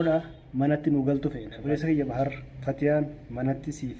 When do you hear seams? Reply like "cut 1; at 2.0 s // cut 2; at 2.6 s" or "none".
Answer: cut 1; at 1.5 s